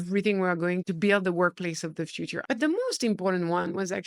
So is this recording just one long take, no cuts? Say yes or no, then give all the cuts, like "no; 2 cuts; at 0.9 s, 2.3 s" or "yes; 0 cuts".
no; 2 cuts; at 0.9 s, 2.3 s